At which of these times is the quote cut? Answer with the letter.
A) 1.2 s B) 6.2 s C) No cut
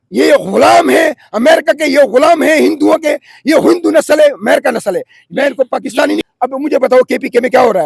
B